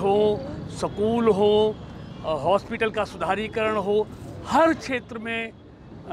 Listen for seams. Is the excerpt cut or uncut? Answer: cut